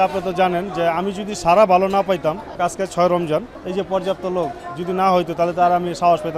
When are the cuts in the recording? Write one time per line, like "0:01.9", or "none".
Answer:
0:02.6
0:03.6